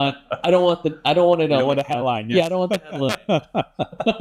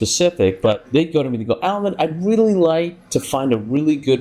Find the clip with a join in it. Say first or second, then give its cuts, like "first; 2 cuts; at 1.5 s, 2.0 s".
second; 2 cuts; at 0.8 s, 3.0 s